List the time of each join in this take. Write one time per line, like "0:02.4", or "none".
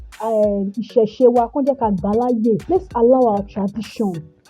0:02.6